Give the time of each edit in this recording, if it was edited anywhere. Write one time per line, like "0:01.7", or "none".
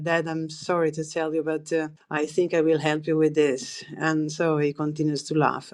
0:02.0